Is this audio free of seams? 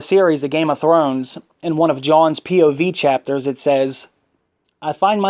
no; 1 cut; at 3.0 s

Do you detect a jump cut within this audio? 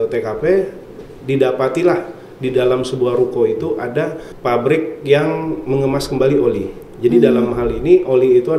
yes; 1 cut; at 4.3 s

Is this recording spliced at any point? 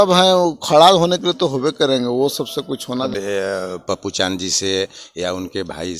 yes; 1 cut; at 3.1 s

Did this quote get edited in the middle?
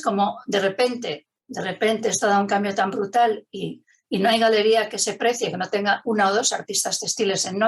no; 0 cuts

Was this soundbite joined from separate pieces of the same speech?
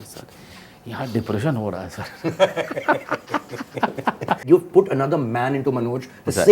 yes; 1 cut; at 4.5 s

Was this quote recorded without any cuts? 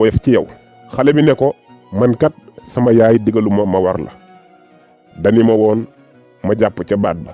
yes; 0 cuts

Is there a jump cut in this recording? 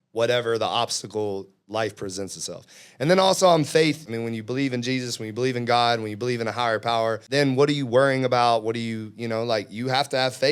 yes; 2 cuts; at 4.0 s, 7.2 s

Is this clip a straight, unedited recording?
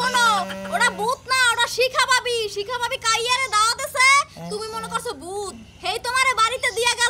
yes; 0 cuts

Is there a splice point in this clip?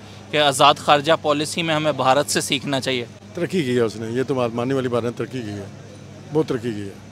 no; 0 cuts

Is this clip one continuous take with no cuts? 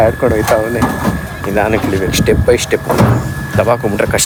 yes; 0 cuts

